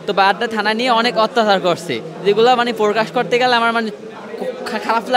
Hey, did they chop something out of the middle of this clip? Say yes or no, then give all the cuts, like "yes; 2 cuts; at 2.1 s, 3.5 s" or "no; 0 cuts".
no; 0 cuts